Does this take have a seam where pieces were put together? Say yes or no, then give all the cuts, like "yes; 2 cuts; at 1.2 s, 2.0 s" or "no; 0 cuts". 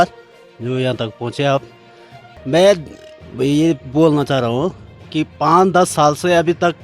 no; 0 cuts